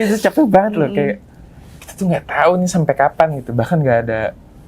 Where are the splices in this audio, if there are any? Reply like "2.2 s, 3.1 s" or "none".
none

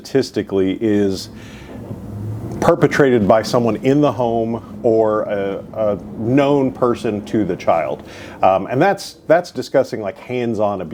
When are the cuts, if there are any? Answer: none

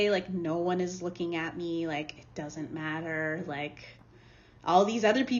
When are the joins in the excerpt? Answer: none

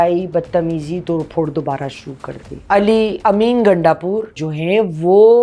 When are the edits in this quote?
2.7 s

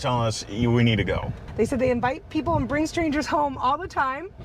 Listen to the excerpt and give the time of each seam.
1.4 s

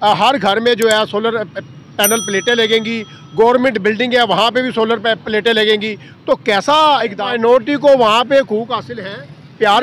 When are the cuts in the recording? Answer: 7.2 s

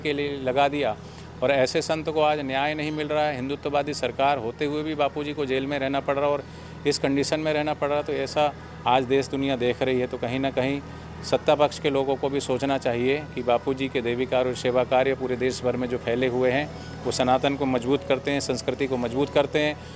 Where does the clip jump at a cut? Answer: none

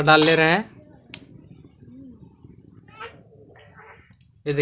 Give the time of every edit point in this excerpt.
2.9 s

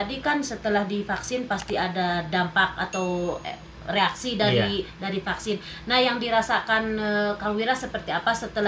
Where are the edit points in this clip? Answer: none

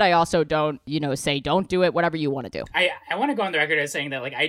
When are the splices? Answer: 0.8 s, 2.7 s

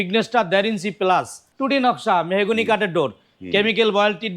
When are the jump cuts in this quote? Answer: 1.4 s

